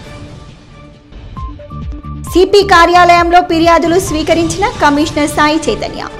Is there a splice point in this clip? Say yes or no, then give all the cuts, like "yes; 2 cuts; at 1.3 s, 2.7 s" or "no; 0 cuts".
yes; 2 cuts; at 1.0 s, 2.2 s